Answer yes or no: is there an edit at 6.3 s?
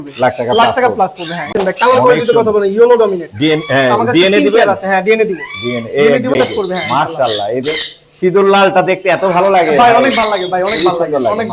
yes